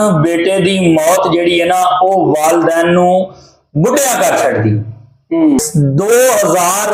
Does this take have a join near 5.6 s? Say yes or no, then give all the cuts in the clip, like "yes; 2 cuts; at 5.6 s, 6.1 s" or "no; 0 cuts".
yes; 1 cut; at 5.6 s